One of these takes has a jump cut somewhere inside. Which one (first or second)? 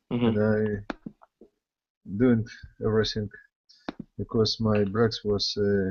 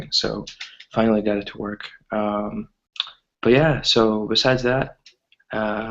second